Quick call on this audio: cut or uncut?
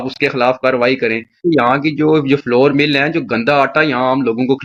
uncut